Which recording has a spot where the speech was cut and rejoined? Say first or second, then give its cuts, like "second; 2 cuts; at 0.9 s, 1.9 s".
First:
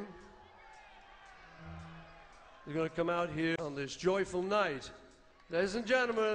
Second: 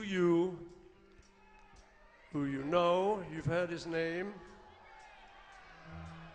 first; 1 cut; at 3.5 s